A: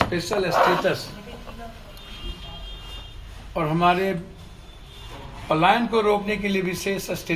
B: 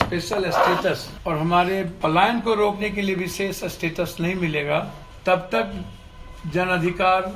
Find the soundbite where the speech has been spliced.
B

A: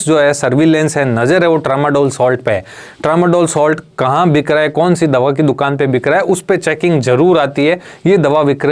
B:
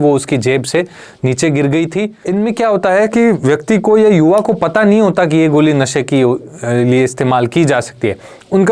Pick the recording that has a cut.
B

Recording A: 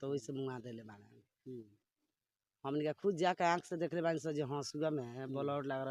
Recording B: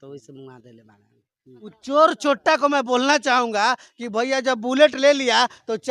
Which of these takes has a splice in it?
B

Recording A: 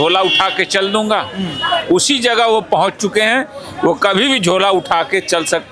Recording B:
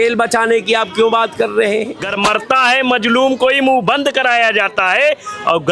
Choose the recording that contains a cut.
B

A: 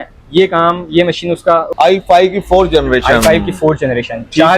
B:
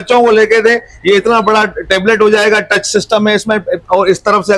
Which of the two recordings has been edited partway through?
A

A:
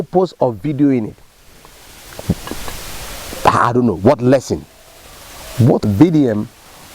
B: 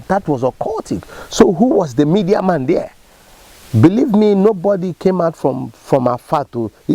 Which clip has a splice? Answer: A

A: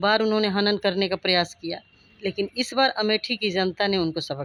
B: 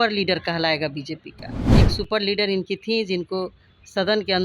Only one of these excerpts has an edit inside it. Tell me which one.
B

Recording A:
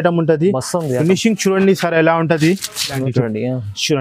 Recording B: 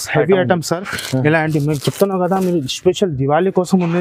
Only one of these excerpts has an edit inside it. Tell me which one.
A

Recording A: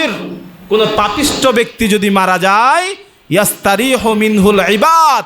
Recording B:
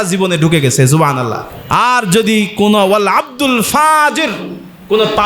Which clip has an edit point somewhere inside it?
B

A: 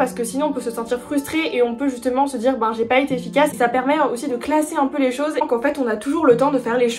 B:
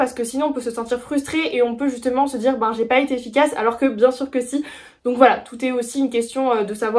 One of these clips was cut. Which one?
A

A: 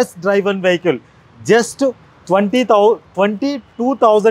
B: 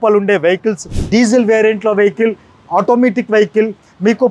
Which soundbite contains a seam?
B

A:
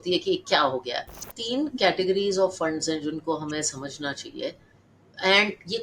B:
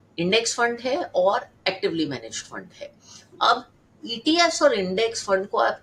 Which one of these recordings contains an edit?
A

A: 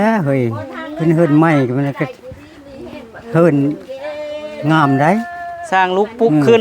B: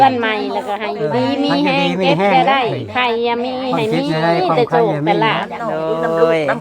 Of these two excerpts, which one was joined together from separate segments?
B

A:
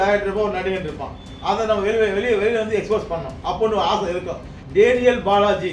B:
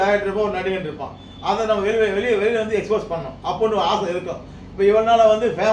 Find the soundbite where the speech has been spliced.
A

